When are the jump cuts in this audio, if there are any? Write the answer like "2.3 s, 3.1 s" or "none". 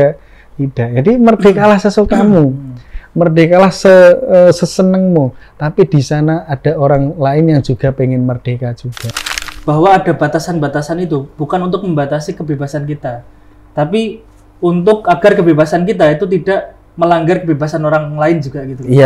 9.1 s